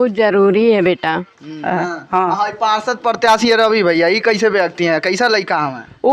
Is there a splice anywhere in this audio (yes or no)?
yes